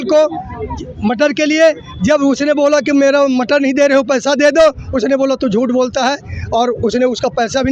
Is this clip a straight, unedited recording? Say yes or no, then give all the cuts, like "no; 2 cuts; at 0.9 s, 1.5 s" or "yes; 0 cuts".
yes; 0 cuts